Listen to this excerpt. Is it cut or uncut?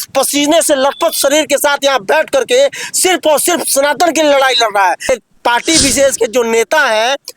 cut